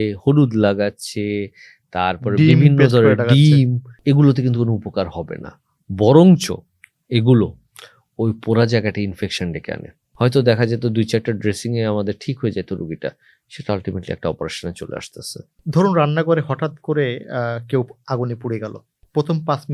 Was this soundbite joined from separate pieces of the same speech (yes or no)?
yes